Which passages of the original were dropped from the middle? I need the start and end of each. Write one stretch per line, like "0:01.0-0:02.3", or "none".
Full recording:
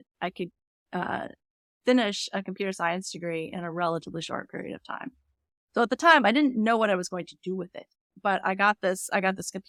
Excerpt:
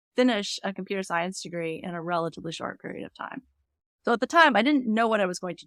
none